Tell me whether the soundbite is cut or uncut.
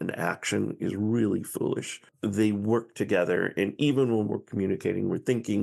cut